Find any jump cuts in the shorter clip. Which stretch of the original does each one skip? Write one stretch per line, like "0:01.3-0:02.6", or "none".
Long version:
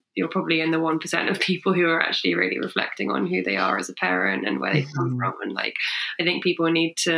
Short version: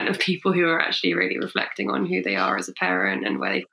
none